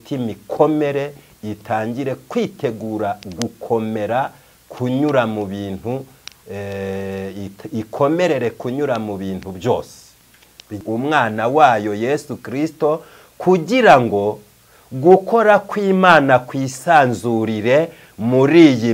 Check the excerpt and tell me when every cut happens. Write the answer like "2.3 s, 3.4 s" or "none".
10.8 s